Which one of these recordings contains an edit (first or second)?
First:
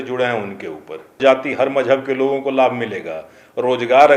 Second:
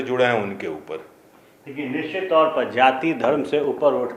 first